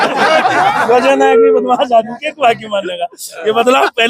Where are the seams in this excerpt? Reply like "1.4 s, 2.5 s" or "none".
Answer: none